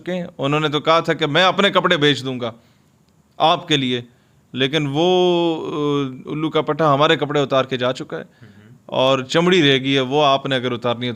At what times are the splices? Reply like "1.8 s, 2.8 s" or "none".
none